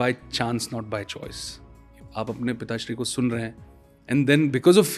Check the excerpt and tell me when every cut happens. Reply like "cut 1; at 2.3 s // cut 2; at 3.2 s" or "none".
cut 1; at 2.0 s